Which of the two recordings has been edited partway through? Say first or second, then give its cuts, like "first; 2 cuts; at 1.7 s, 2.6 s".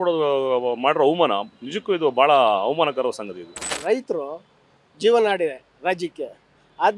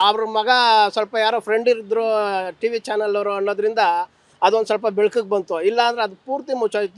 first; 1 cut; at 3.8 s